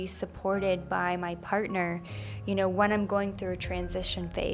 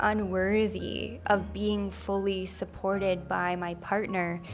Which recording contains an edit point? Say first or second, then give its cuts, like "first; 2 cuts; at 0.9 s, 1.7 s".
second; 1 cut; at 1.1 s